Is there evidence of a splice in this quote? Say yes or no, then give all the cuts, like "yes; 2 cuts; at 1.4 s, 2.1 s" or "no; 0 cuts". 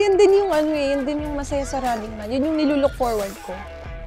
no; 0 cuts